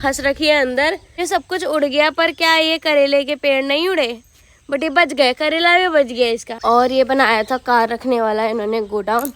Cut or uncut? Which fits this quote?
cut